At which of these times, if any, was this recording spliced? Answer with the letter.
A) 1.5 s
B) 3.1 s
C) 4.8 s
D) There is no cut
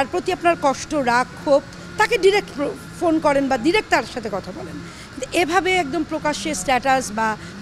D